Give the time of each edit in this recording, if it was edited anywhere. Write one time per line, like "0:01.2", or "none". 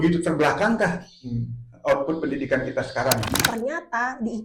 0:03.4